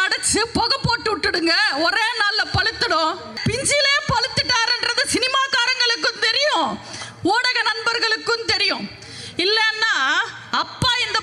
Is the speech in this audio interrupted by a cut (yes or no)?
yes